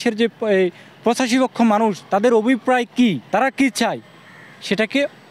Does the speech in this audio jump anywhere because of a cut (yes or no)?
yes